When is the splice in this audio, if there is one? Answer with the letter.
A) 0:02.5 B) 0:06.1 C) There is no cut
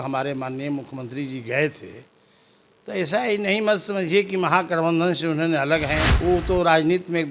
B